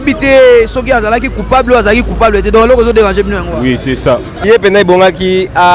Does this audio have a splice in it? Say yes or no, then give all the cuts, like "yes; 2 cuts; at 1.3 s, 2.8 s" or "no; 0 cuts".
yes; 1 cut; at 4.4 s